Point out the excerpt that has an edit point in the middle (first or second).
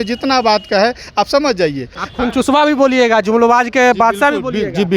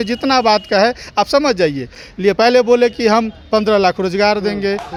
first